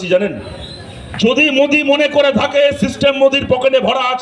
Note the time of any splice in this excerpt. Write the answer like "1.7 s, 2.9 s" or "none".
1.1 s

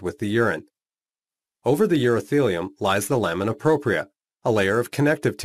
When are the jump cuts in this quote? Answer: 1.6 s

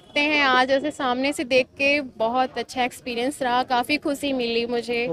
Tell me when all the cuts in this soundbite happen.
none

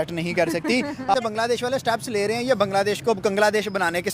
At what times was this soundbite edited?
1.1 s

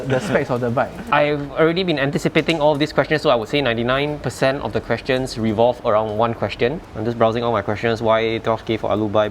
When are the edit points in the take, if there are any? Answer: 1.0 s, 6.9 s

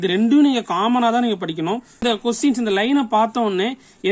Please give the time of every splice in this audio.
2.0 s

